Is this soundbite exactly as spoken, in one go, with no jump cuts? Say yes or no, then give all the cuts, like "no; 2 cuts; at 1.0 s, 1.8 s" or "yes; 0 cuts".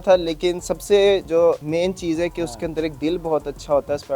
no; 1 cut; at 1.4 s